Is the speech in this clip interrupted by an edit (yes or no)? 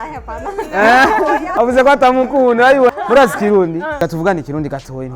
yes